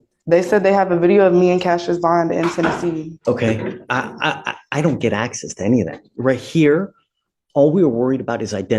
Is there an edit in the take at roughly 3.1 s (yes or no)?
yes